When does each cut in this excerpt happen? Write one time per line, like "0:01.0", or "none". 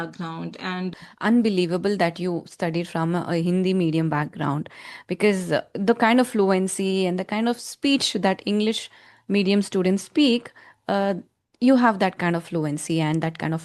0:00.9